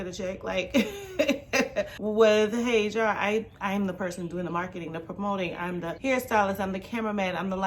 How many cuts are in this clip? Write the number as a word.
two